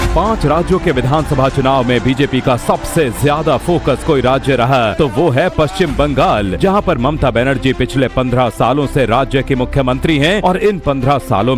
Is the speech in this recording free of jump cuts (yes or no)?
no